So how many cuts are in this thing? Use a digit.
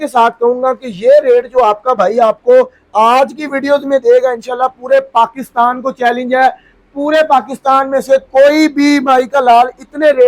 0